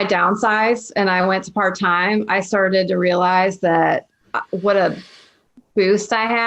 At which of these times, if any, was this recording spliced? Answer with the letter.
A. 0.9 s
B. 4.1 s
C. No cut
C